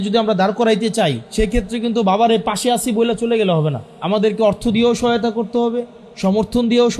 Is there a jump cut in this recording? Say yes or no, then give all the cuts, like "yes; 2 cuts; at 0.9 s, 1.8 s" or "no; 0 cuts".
yes; 2 cuts; at 1.2 s, 3.9 s